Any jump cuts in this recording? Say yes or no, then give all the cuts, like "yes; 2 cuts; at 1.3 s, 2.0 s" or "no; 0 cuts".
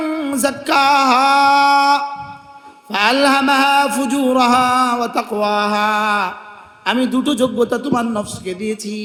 no; 0 cuts